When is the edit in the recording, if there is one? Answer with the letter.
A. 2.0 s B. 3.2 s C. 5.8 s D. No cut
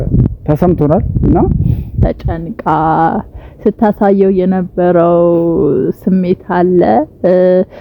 A